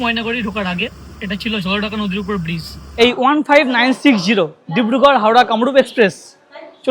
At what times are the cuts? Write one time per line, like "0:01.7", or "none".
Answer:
0:02.9